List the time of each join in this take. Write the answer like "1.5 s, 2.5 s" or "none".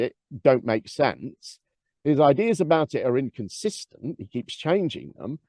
none

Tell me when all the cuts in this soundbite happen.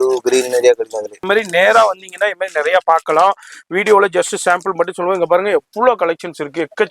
1.2 s

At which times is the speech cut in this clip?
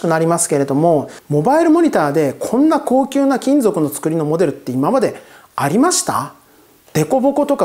1.2 s

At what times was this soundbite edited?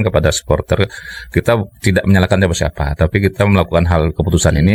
none

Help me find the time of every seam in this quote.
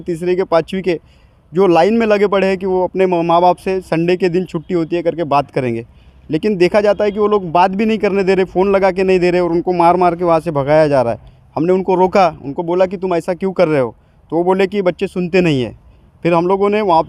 none

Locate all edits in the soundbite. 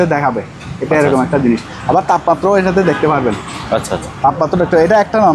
none

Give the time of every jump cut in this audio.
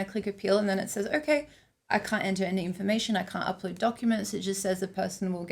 none

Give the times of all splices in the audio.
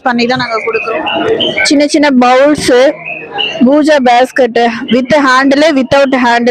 0.9 s

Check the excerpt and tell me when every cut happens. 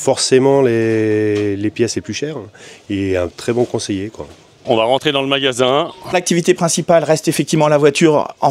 4.6 s, 6.1 s

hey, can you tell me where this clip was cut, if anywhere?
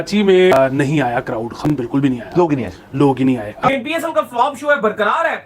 3.5 s

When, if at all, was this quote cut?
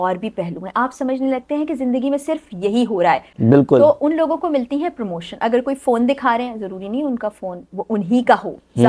3.3 s

